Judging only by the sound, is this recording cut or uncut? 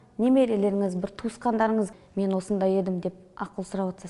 cut